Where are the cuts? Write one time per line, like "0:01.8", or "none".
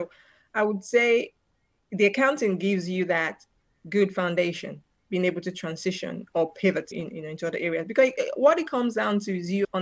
none